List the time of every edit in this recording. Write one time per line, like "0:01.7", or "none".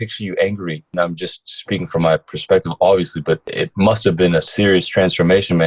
0:00.9
0:03.5
0:04.5